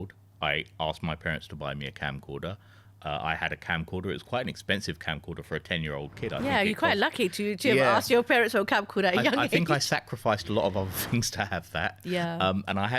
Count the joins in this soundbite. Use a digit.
0